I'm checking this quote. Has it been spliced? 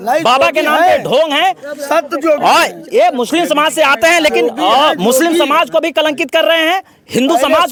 no; 0 cuts

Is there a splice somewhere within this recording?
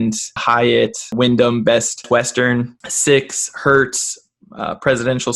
yes; 1 cut; at 1.0 s

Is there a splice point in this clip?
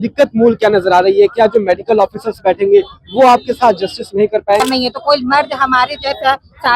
yes; 1 cut; at 4.6 s

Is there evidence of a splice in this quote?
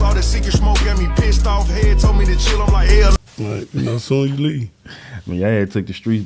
yes; 1 cut; at 3.1 s

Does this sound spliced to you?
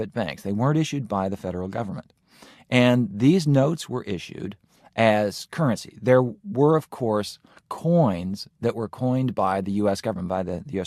no; 0 cuts

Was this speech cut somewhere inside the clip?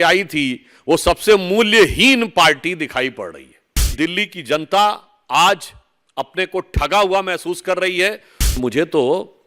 yes; 2 cuts; at 4.0 s, 8.5 s

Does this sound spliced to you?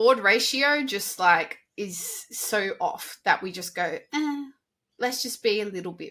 no; 0 cuts

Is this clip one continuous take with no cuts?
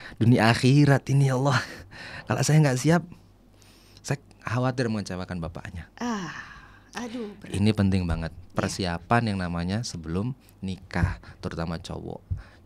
yes; 0 cuts

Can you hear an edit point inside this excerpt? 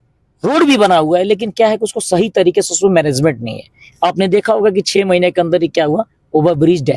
no; 0 cuts

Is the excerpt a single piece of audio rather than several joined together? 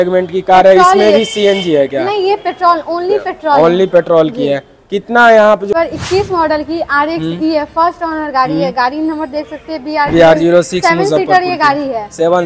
no; 1 cut; at 5.7 s

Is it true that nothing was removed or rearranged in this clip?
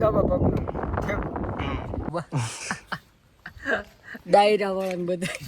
no; 1 cut; at 2.1 s

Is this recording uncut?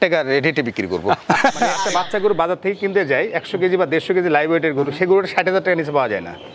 no; 1 cut; at 1.8 s

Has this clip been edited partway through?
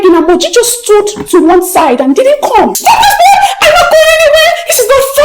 yes; 1 cut; at 2.8 s

